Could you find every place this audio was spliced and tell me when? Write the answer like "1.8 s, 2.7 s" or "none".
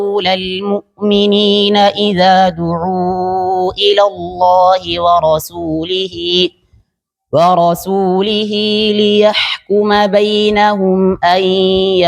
none